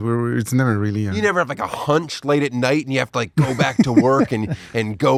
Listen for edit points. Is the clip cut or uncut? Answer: uncut